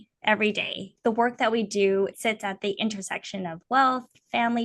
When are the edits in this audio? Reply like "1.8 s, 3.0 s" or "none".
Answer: 0.9 s, 2.1 s